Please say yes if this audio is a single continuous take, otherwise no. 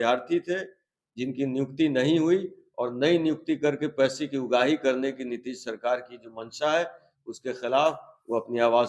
yes